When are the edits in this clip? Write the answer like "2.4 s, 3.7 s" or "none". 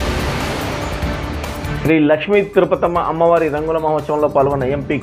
1.7 s